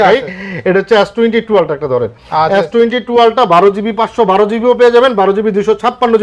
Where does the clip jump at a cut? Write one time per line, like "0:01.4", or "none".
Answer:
none